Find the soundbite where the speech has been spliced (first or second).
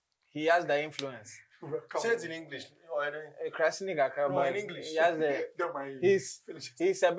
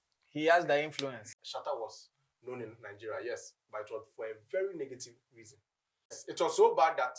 second